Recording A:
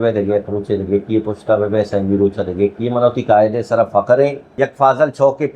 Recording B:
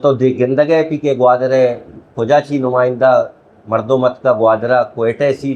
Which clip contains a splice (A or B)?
A